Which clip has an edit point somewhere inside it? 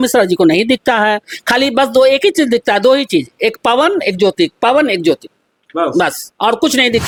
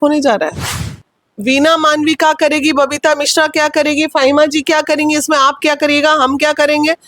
second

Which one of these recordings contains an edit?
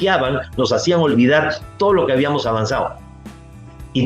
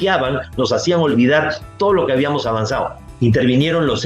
second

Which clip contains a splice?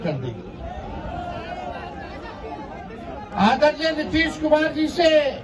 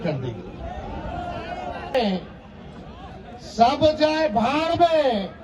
second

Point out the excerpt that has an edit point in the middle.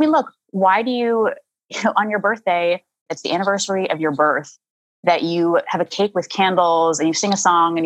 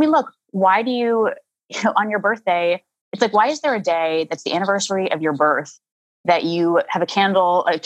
first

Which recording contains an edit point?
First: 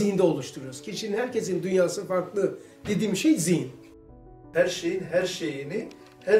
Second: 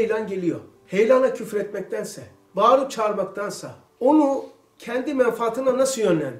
first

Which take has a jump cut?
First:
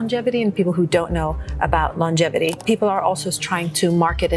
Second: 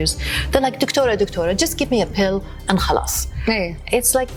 first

